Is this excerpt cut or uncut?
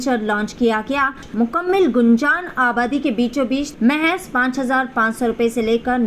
cut